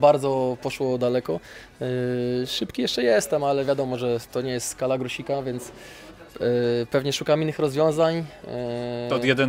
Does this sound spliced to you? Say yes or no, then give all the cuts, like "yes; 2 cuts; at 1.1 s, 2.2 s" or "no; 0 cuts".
no; 0 cuts